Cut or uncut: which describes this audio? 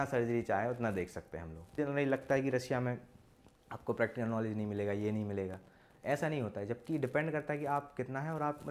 cut